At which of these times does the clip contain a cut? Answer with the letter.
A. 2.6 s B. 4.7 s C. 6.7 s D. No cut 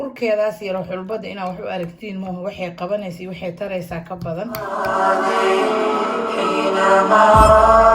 B